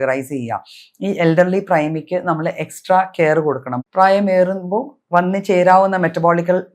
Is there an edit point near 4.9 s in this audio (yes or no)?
no